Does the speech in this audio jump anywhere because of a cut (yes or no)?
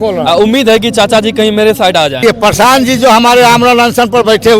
yes